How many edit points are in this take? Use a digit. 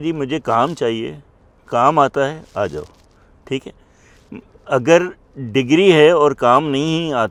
0